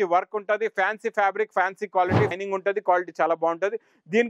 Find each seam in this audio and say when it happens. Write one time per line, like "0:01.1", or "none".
0:02.3

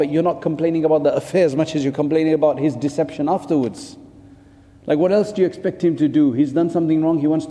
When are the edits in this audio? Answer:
none

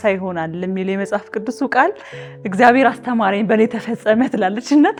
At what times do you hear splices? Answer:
none

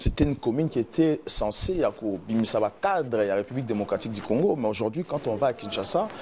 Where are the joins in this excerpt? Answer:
none

